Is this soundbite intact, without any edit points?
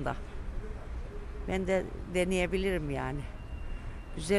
yes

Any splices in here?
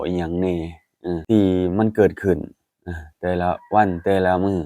yes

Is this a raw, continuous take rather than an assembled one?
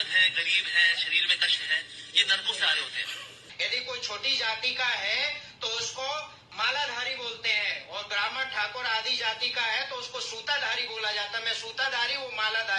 no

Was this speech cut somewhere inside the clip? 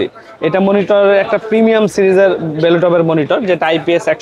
no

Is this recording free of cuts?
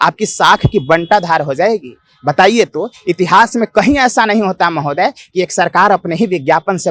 yes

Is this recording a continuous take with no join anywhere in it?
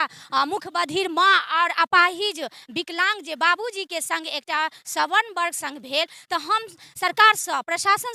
yes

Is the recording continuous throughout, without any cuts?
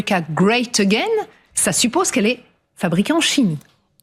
yes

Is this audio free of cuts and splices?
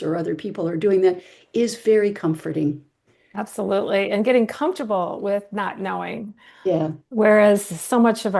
yes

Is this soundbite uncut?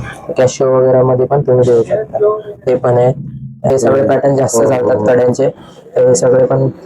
no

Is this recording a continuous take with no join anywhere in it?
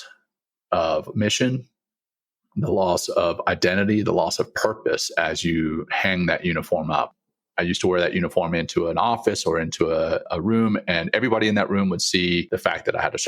no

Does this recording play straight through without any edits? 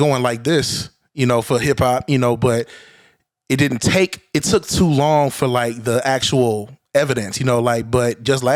yes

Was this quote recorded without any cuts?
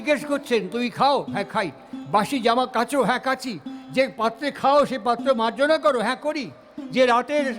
yes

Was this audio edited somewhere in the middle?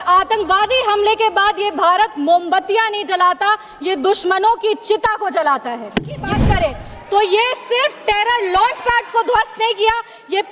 yes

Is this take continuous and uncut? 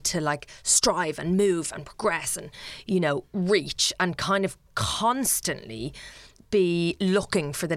yes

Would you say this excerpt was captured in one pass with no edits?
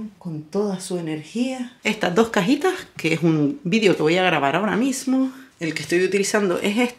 no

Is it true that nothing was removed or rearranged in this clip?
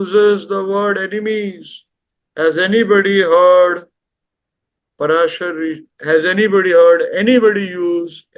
yes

